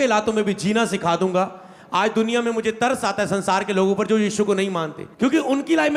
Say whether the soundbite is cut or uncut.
uncut